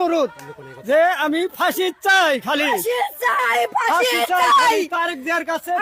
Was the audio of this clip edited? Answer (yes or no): no